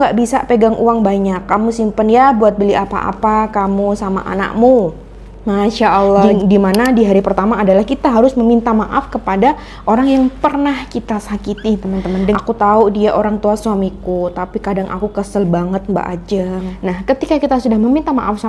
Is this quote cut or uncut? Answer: cut